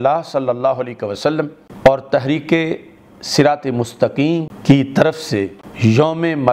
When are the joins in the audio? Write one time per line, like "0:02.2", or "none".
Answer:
0:01.6
0:04.5
0:05.6